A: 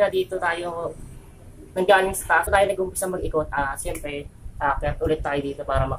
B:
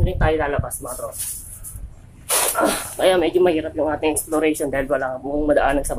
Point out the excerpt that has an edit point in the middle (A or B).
A